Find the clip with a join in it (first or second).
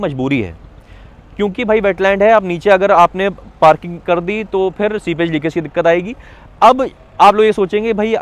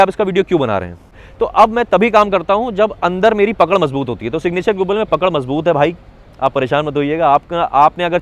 second